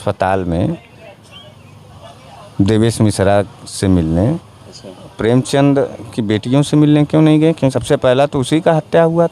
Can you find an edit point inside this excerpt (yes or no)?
yes